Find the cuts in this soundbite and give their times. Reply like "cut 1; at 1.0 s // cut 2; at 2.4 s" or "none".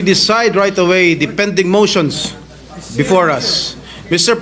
none